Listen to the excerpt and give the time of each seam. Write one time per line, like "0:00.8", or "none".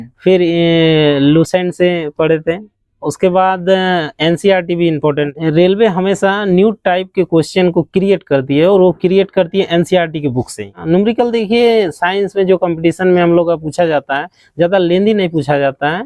0:05.3
0:10.8